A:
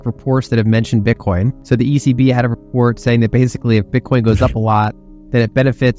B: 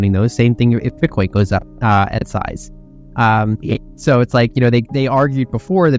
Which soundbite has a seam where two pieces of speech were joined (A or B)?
A